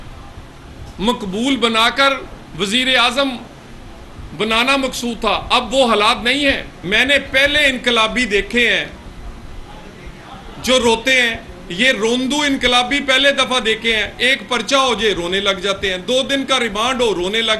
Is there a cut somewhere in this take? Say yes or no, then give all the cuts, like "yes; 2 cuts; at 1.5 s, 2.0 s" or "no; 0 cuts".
yes; 1 cut; at 6.7 s